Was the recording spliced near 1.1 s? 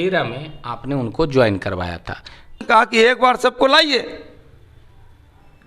no; 1 cut; at 2.6 s

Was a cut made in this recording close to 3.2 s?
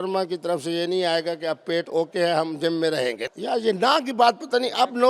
yes; 1 cut; at 3.2 s

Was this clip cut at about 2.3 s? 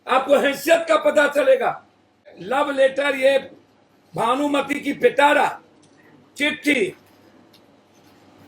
yes; 1 cut; at 2.3 s

